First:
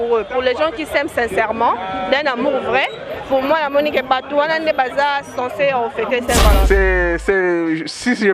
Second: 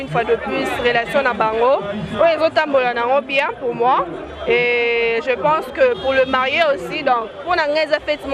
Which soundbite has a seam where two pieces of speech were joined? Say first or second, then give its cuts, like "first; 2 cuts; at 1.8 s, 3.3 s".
first; 1 cut; at 6.6 s